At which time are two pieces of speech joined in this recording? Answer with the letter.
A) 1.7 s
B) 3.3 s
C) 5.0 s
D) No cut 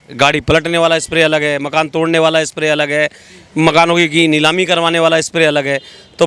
D